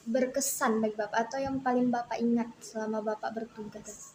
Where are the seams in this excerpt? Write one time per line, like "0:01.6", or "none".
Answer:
none